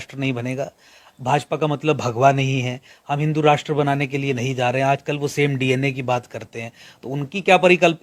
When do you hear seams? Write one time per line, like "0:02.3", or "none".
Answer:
none